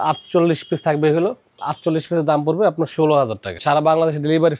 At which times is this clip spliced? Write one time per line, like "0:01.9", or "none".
0:01.6
0:03.6